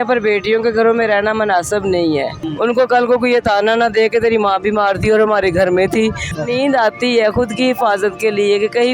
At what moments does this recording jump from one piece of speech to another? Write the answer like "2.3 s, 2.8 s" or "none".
2.4 s, 6.3 s